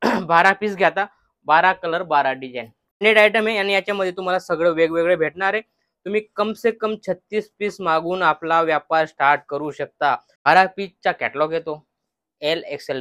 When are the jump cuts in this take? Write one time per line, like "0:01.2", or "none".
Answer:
0:03.0
0:10.3

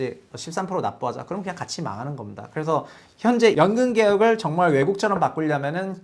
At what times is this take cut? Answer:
0:03.5

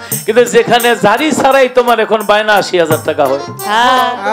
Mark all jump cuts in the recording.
none

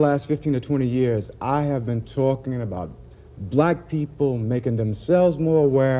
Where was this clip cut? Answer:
none

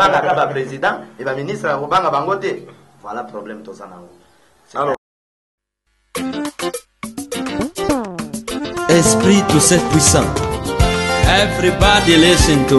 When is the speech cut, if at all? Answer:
0:04.9

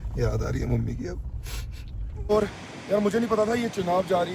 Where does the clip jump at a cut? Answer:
0:02.3

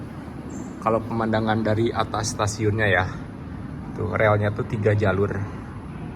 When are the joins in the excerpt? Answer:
none

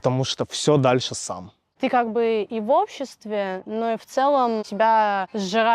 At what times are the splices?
0:01.7

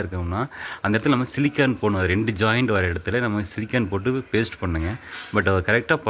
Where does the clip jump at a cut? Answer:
none

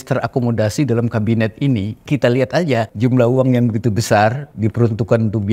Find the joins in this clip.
0:02.1
0:02.9
0:04.5

